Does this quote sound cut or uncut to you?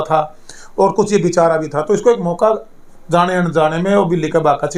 uncut